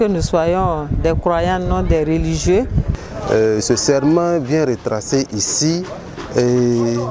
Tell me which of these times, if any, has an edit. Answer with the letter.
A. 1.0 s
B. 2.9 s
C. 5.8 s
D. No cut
B